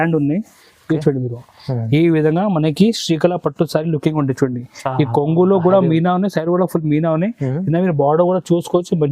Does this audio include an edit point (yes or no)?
no